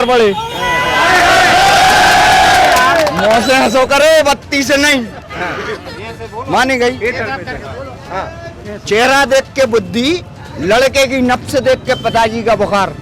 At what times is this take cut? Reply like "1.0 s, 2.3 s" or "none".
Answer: none